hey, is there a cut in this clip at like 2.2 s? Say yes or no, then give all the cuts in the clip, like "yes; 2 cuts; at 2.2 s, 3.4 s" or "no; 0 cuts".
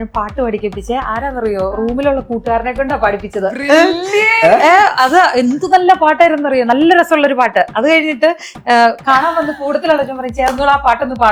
no; 0 cuts